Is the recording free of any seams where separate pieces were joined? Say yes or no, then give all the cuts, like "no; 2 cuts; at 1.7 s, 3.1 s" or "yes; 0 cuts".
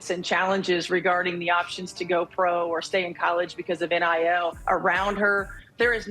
no; 1 cut; at 4.6 s